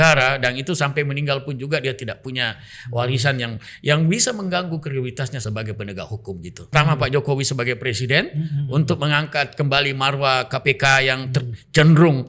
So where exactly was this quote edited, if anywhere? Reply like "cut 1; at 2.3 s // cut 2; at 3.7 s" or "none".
cut 1; at 5.4 s // cut 2; at 6.5 s

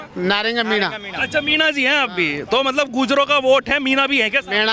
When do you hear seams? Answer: none

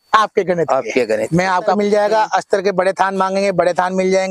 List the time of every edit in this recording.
cut 1; at 1.8 s

